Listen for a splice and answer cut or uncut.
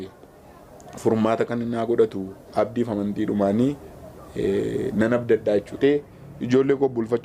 uncut